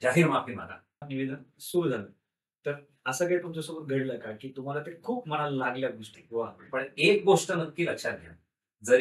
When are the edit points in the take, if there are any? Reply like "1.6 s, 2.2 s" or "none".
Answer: 1.0 s, 6.2 s